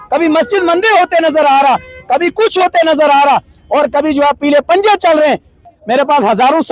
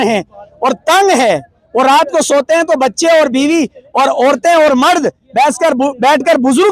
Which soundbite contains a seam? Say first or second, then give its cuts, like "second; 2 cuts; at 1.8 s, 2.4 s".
first; 1 cut; at 5.6 s